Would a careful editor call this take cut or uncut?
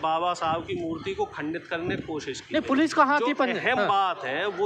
uncut